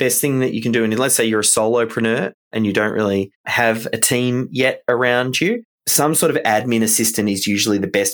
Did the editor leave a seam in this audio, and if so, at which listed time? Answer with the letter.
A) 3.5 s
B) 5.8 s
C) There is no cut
B